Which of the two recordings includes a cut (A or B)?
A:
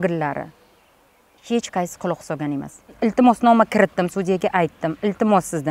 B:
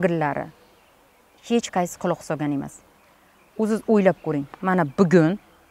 A